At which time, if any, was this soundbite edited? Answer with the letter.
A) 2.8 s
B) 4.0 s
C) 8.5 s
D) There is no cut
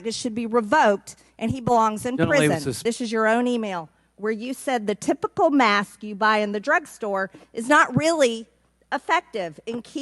A